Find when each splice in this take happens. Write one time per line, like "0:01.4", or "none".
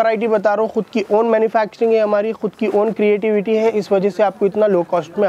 none